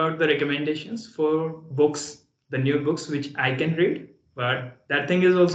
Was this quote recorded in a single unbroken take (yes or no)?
yes